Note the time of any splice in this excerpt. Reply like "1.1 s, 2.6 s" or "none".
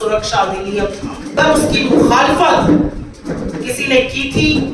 1.4 s